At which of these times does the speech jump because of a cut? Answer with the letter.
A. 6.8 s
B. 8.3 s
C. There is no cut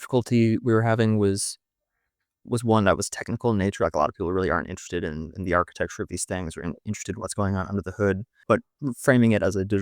B